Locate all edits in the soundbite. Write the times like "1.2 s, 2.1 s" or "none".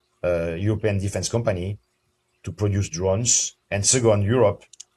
3.5 s